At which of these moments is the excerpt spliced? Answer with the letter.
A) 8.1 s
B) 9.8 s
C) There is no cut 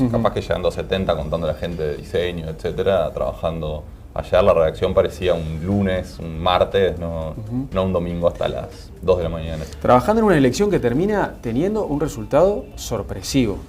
A